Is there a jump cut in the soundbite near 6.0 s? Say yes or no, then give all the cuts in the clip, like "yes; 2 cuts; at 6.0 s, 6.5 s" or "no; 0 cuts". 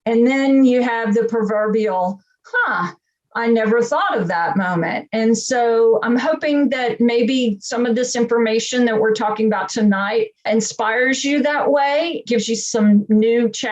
yes; 2 cuts; at 6.0 s, 10.4 s